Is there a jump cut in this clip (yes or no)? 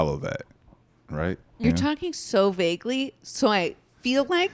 yes